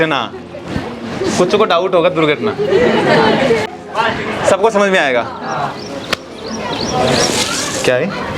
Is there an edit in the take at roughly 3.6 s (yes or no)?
yes